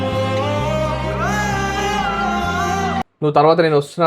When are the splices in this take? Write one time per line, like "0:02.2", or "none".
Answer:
0:03.0